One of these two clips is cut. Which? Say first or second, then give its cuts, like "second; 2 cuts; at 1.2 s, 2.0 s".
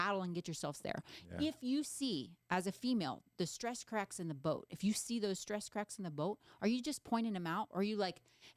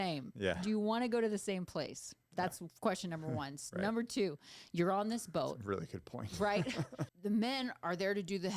second; 1 cut; at 7.1 s